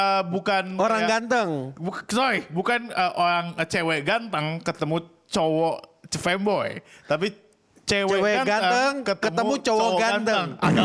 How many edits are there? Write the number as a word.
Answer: zero